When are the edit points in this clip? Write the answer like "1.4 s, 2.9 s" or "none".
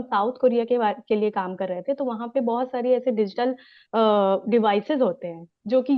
none